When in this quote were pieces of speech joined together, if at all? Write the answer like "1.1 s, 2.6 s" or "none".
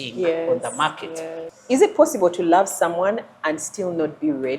1.4 s